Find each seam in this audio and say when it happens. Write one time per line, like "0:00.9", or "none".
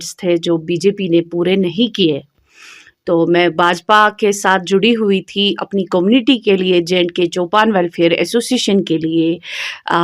none